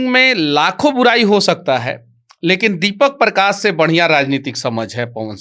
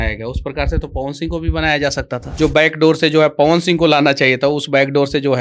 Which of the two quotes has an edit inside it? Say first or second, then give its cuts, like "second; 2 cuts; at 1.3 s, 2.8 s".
second; 1 cut; at 2.2 s